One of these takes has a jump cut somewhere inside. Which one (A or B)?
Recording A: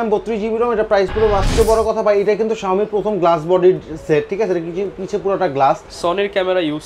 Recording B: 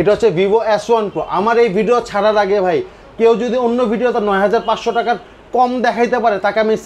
A